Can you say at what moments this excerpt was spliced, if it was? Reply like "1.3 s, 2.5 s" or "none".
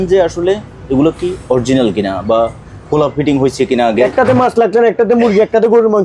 4.1 s